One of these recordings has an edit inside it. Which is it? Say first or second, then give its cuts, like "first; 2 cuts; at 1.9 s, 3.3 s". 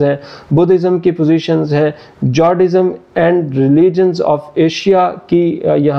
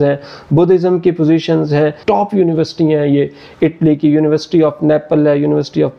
second; 1 cut; at 2.0 s